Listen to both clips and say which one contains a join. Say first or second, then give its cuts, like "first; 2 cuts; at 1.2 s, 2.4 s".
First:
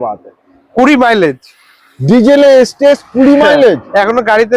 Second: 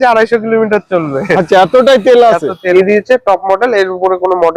second; 1 cut; at 2.7 s